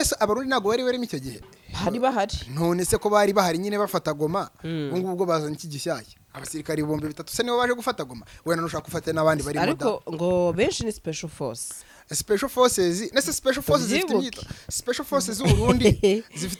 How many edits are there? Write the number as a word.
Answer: zero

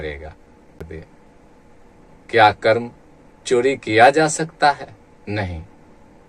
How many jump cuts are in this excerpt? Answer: one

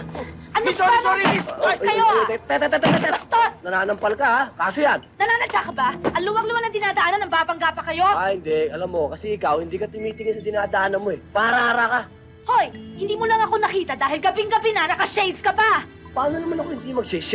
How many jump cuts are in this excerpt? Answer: zero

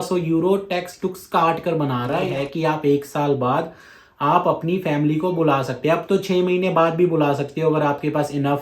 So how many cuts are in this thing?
one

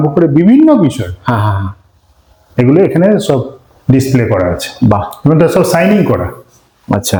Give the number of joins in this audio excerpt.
zero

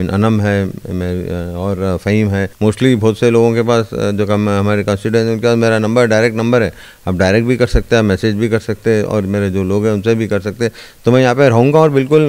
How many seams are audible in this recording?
one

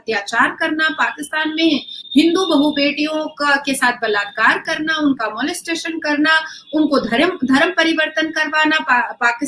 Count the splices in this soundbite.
zero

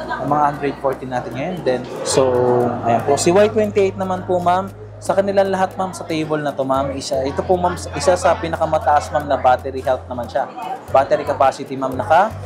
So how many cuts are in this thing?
one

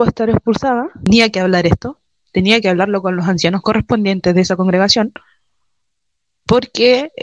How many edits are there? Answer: one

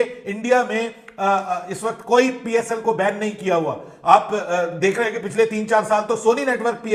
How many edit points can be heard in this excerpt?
zero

